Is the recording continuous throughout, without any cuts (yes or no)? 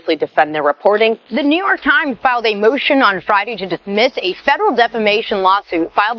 no